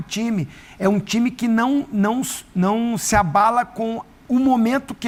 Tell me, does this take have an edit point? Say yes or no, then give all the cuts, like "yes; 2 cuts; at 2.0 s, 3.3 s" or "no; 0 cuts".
no; 0 cuts